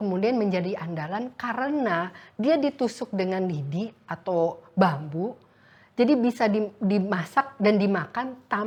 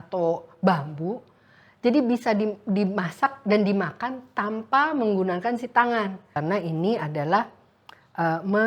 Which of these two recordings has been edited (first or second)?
second